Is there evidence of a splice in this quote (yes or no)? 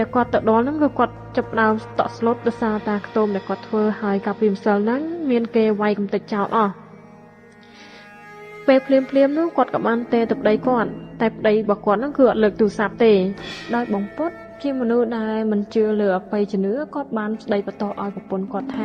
yes